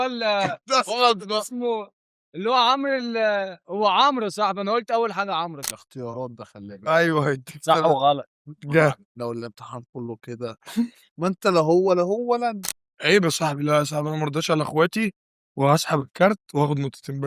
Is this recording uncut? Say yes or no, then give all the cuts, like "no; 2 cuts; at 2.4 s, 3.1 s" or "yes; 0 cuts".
no; 3 cuts; at 5.6 s, 11.0 s, 12.7 s